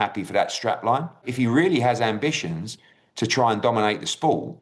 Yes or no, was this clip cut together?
yes